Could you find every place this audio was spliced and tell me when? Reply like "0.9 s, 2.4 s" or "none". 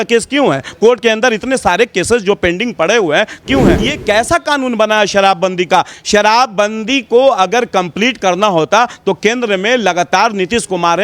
3.9 s